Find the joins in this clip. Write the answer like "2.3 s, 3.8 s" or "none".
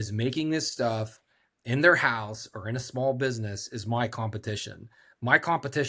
none